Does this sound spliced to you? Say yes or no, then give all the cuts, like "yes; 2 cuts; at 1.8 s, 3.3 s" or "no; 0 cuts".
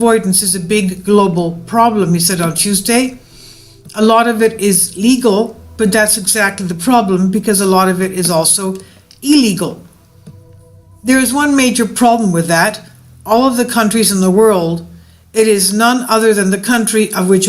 yes; 1 cut; at 16.4 s